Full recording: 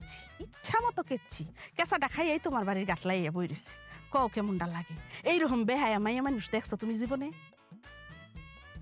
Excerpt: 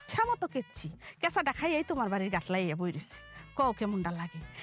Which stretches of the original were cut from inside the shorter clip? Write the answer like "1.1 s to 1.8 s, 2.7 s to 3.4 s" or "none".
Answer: none